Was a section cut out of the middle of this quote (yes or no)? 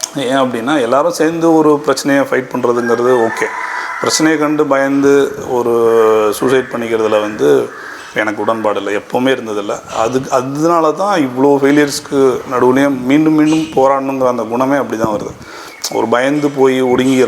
no